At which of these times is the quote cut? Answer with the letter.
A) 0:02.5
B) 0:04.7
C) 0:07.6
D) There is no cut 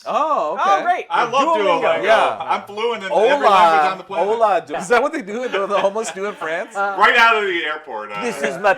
B